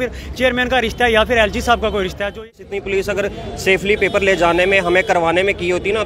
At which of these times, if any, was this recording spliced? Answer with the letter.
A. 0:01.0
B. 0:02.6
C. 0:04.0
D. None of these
B